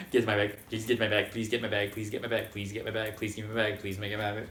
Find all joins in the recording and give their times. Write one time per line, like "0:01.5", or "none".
none